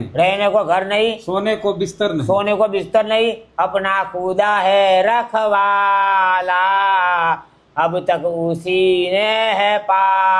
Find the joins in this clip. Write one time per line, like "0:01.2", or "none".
none